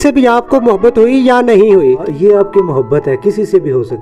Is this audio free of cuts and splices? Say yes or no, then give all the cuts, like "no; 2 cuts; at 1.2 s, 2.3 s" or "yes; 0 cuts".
no; 1 cut; at 2.0 s